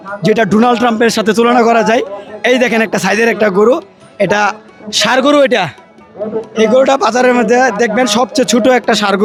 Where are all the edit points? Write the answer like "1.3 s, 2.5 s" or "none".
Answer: none